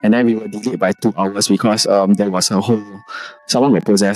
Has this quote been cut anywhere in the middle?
no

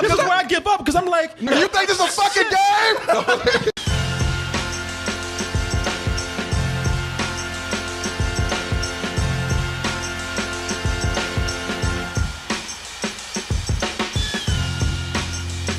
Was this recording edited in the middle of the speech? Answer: yes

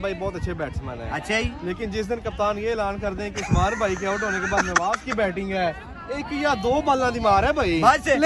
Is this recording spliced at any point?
no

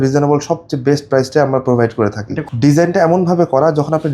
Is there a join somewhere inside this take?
yes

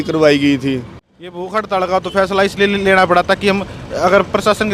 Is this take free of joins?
no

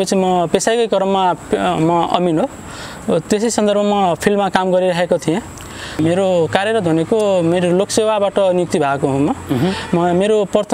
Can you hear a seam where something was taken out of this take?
yes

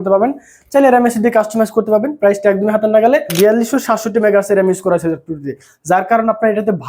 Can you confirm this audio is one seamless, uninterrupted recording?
no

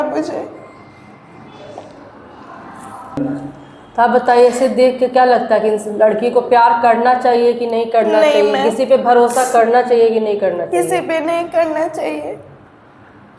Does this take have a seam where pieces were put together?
no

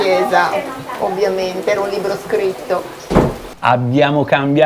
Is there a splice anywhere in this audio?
yes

